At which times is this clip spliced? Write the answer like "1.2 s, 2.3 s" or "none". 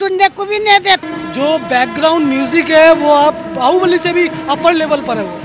1.0 s